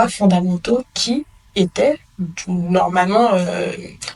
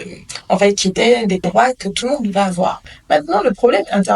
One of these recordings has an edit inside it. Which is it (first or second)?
second